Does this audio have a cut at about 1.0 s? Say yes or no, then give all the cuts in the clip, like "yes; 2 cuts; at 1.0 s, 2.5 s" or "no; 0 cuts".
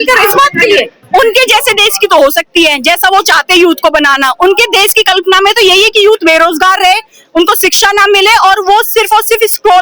yes; 1 cut; at 1.0 s